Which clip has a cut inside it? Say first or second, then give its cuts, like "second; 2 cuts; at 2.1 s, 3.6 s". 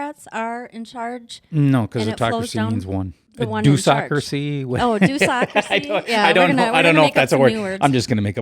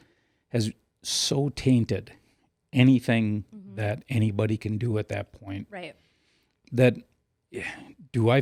first; 1 cut; at 3.2 s